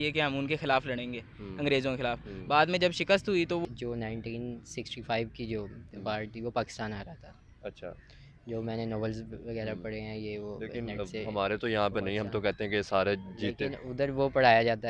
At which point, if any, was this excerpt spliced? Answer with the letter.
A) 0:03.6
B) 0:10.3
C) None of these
A